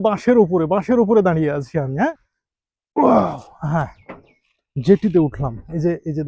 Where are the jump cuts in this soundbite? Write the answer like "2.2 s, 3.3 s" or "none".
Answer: 2.1 s